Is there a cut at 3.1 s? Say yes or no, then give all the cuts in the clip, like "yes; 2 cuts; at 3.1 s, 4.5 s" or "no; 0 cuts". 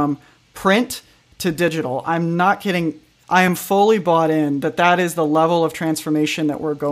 yes; 1 cut; at 3.1 s